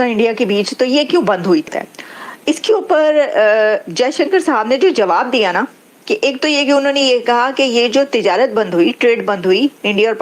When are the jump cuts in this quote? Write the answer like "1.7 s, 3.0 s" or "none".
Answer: 1.8 s